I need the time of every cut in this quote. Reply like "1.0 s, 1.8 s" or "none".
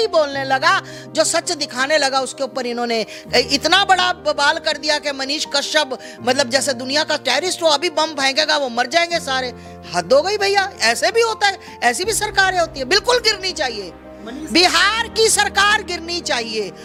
none

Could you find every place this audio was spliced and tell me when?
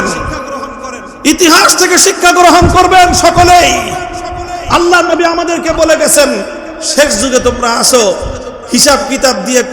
4.5 s

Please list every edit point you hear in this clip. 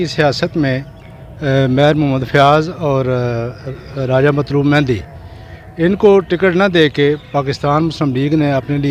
none

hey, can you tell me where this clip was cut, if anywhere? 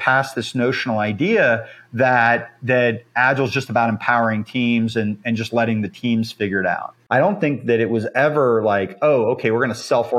6.9 s

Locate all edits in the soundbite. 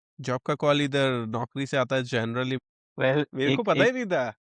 2.6 s

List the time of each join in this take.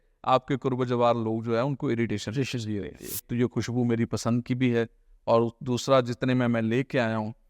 3.2 s

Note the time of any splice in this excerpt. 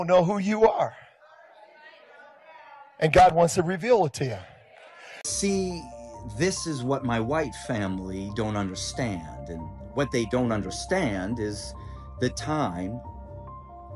5.3 s

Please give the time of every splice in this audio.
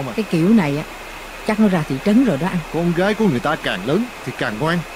2.7 s

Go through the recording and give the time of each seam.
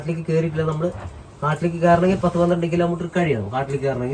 none

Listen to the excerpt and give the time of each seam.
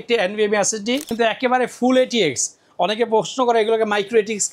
1.1 s

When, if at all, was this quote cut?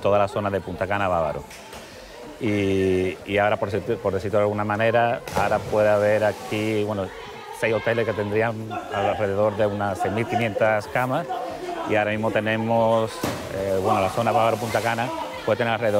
none

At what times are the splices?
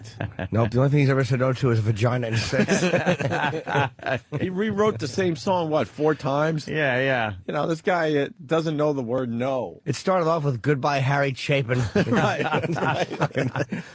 4.4 s

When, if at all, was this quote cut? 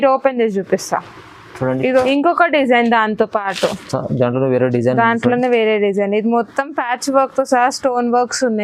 1.9 s

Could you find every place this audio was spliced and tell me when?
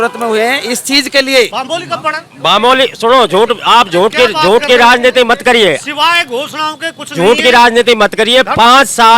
1.6 s

